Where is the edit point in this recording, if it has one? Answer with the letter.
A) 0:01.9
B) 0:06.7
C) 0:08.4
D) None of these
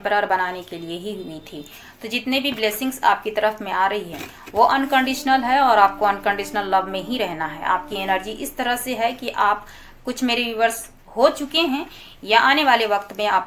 D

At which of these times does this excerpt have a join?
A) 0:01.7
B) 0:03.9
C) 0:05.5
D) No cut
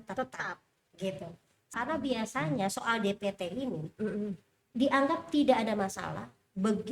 A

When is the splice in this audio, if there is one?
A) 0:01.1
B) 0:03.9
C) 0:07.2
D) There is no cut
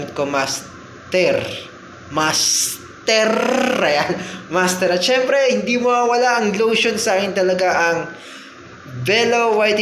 D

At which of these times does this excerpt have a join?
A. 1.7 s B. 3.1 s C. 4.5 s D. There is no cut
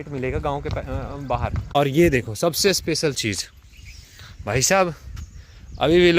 A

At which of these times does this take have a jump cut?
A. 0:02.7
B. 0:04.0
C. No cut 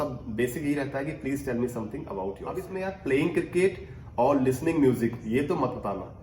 A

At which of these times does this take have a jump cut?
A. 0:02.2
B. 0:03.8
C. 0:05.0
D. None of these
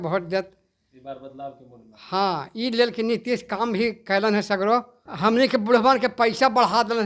C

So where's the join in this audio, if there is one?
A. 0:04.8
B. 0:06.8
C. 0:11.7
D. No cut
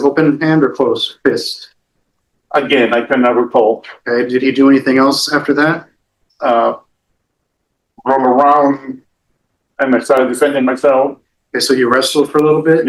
D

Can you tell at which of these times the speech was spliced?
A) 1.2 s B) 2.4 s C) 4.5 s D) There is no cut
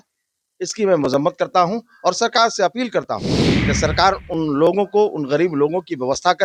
D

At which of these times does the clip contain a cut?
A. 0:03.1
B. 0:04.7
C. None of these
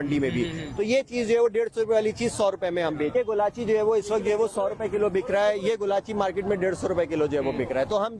A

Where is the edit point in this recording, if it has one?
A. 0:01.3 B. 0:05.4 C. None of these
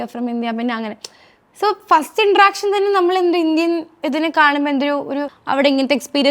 B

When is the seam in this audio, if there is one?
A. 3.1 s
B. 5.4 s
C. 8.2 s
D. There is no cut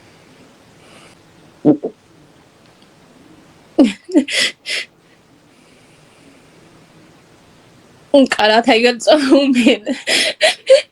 D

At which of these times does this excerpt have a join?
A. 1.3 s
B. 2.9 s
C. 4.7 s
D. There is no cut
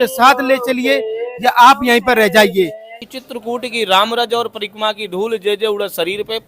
B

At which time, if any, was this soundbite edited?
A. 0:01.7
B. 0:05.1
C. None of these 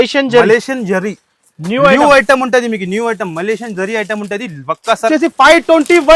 B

